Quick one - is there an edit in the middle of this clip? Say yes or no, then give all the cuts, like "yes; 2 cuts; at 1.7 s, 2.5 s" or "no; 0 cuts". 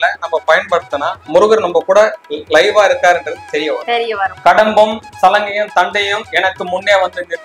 yes; 1 cut; at 4.4 s